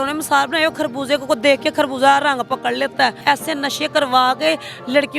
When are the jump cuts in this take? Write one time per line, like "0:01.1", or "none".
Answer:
0:03.2